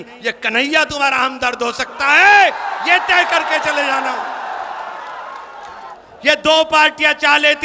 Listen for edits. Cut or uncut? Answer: cut